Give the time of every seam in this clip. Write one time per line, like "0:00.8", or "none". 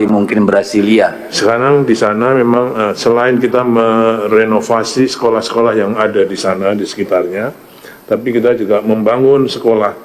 0:01.3